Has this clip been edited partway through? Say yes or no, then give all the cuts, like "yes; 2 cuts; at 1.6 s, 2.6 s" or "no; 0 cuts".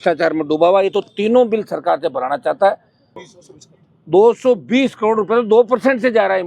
yes; 1 cut; at 3.1 s